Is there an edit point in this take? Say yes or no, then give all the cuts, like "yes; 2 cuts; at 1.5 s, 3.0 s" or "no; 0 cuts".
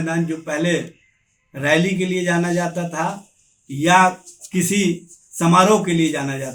no; 0 cuts